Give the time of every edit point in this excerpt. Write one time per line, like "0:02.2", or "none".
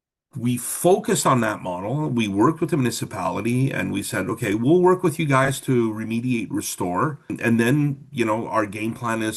0:07.3